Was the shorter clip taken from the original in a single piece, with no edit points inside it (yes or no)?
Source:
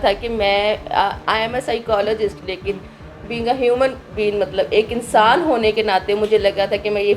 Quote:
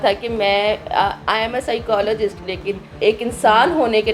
no